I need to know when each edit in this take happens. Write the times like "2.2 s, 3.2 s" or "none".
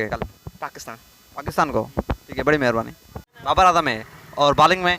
none